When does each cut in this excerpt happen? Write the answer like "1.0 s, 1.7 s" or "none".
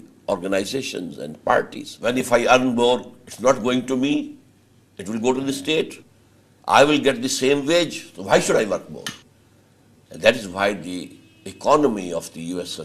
2.2 s